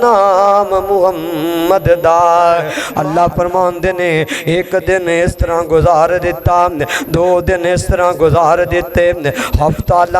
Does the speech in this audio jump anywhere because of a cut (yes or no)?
yes